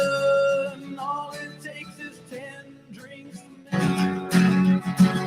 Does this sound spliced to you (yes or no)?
yes